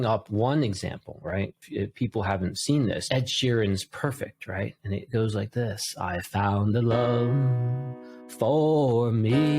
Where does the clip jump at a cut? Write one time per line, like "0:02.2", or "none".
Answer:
0:01.6
0:03.0